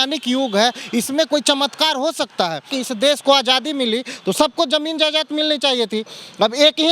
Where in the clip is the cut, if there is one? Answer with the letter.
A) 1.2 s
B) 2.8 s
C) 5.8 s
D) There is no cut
B